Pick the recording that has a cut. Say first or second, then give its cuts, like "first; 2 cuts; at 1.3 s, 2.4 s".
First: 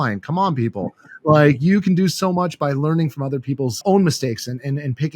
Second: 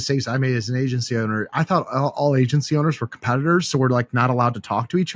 first; 1 cut; at 3.8 s